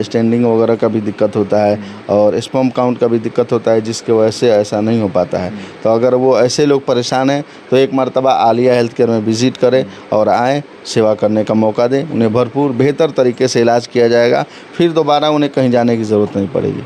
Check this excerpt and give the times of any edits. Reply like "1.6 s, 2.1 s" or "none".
none